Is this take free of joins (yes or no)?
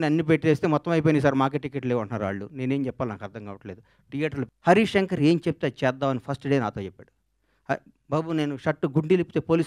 no